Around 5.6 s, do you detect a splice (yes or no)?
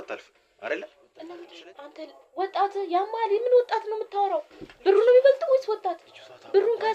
no